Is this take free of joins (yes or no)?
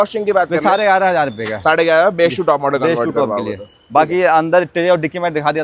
yes